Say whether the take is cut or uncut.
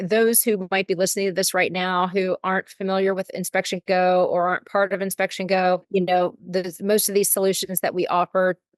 uncut